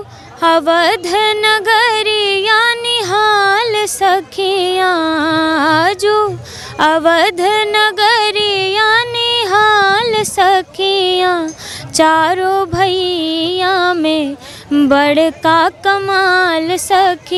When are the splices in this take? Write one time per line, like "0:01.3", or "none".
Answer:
none